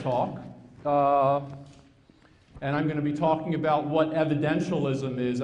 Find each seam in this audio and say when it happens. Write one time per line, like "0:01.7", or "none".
0:04.3